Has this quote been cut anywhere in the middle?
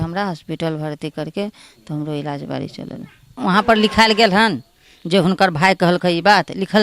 yes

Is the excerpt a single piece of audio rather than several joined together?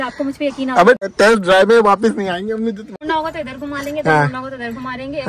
no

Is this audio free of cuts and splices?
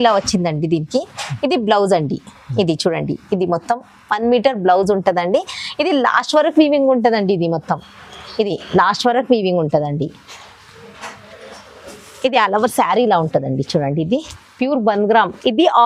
yes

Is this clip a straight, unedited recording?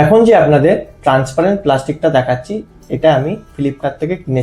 yes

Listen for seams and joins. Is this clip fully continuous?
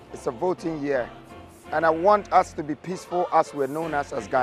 yes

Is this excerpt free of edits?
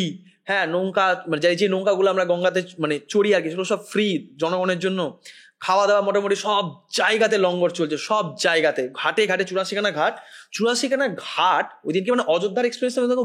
yes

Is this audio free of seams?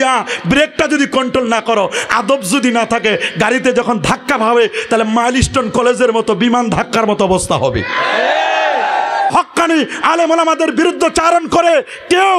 no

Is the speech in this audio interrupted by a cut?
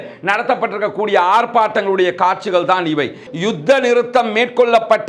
yes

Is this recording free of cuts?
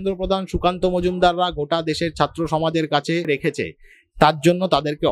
no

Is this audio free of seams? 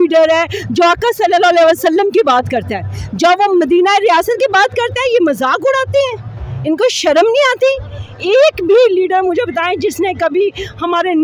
yes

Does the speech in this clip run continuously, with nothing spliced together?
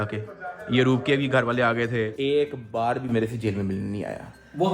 no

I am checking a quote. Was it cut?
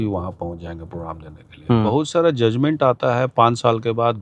yes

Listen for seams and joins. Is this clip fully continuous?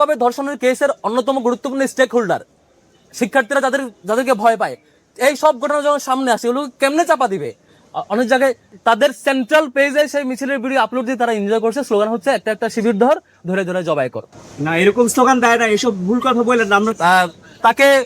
no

